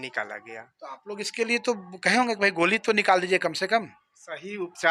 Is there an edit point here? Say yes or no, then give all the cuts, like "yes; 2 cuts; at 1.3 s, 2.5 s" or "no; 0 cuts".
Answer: no; 0 cuts